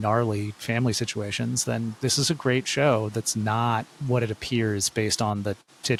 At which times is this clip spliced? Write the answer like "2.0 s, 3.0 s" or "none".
none